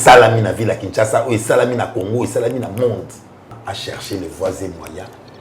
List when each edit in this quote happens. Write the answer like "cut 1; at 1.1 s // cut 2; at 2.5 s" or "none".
cut 1; at 3.6 s